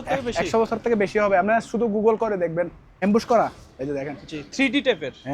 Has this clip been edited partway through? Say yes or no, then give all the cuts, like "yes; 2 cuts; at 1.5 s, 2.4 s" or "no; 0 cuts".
yes; 1 cut; at 3.0 s